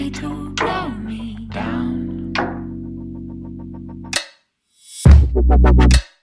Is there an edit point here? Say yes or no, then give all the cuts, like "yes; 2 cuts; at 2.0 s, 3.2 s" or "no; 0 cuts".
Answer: no; 0 cuts